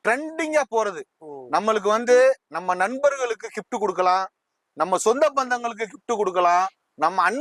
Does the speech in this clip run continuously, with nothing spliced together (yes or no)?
yes